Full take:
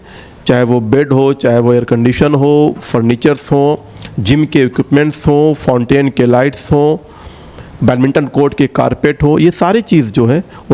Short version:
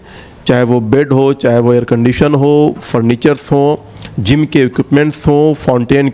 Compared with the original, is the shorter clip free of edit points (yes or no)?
yes